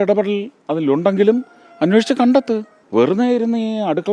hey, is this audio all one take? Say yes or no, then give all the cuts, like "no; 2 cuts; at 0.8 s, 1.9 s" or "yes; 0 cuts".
no; 1 cut; at 2.8 s